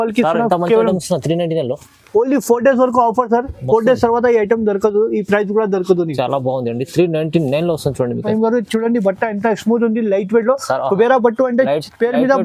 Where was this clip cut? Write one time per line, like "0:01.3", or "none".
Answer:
0:08.3